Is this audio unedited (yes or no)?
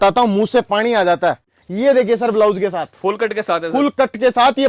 no